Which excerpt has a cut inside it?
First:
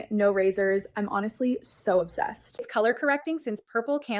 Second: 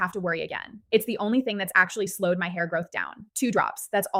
first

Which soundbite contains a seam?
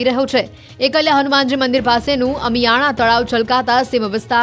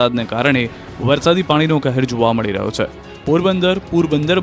second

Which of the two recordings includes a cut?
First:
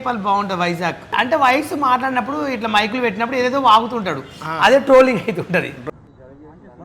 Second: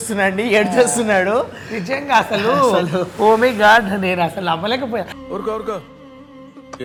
first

